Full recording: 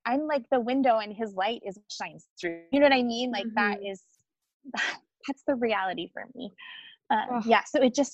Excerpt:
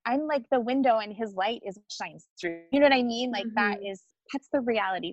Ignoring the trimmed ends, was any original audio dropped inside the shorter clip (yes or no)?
yes